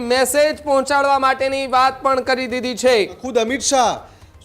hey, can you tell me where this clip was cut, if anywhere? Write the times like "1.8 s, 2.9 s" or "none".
3.2 s